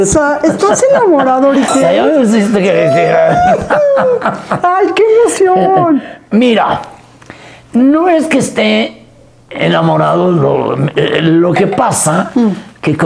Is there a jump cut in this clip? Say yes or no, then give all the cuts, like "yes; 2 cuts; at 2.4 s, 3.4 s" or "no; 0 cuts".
no; 0 cuts